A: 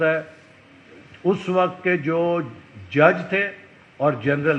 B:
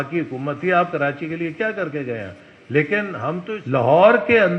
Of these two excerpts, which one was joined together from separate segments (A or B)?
B